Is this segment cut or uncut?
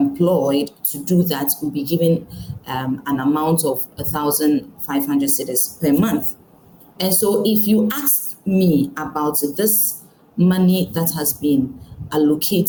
uncut